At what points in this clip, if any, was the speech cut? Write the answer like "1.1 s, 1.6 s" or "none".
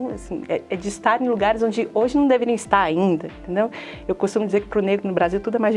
none